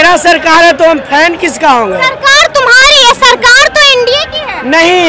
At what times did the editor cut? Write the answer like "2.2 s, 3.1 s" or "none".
none